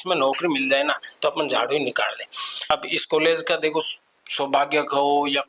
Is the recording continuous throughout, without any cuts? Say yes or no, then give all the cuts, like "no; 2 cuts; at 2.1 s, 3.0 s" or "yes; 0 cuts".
no; 1 cut; at 2.6 s